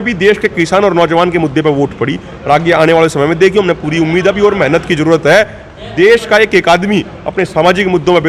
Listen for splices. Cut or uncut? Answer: uncut